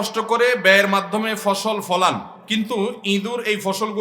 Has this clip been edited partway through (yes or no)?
yes